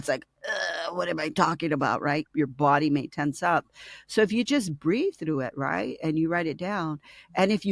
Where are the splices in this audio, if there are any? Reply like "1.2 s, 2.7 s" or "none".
2.3 s